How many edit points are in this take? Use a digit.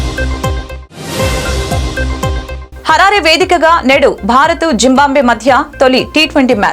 1